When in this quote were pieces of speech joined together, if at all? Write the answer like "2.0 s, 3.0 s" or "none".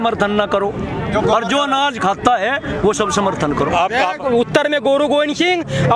4.2 s

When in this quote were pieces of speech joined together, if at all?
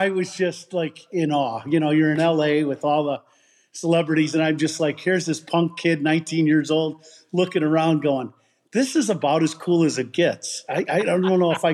none

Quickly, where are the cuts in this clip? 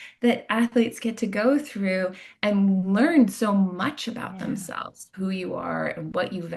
5.0 s

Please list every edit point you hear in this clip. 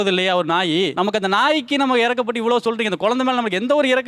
none

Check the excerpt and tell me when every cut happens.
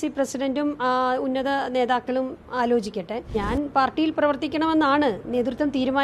3.3 s

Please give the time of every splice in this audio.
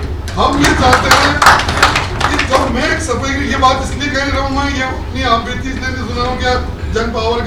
none

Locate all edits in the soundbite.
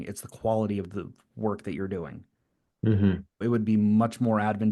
3.4 s

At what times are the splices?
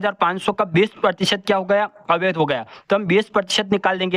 none

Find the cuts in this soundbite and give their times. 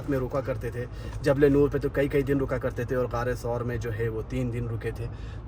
none

